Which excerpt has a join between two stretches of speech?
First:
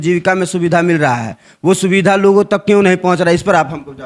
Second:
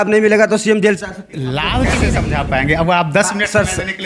second; 1 cut; at 2.0 s

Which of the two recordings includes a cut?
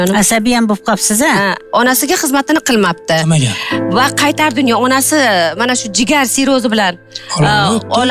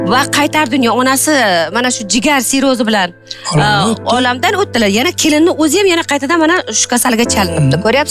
first; 1 cut; at 1.6 s

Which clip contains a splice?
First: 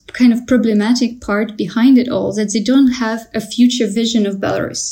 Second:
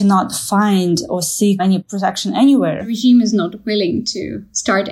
second; 2 cuts; at 1.8 s, 3.0 s

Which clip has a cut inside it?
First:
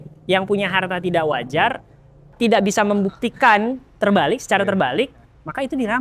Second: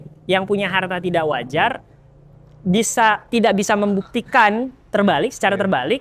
first; 1 cut; at 2.3 s

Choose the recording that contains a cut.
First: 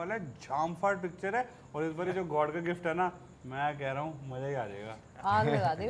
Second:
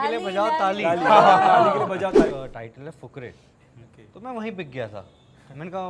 second; 1 cut; at 2.3 s

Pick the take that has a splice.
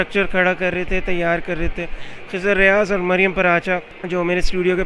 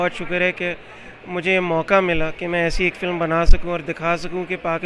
first; 1 cut; at 3.9 s

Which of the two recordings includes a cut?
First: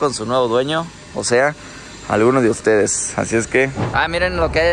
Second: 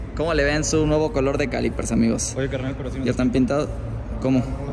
first; 1 cut; at 3.8 s

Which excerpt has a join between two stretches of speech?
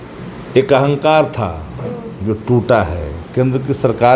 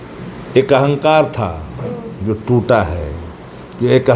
first; 1 cut; at 3.2 s

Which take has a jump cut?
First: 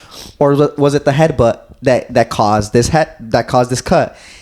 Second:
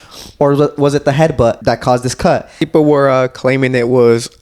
second; 2 cuts; at 1.6 s, 2.6 s

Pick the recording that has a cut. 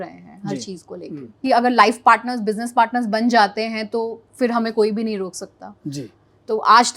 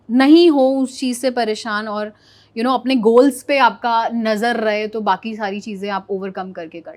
first; 1 cut; at 1.4 s

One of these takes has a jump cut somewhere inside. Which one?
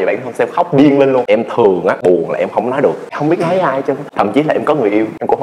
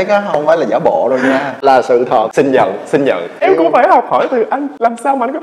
first; 1 cut; at 1.2 s

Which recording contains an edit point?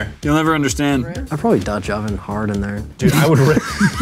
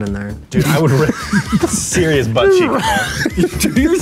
first; 1 cut; at 1.2 s

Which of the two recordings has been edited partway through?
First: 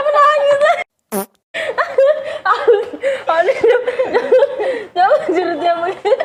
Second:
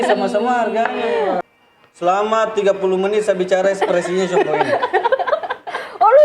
second; 1 cut; at 1.4 s

